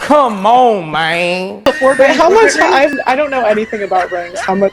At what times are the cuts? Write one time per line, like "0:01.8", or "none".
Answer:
0:01.7
0:02.9